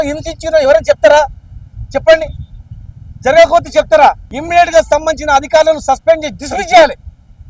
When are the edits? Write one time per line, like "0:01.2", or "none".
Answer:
0:04.3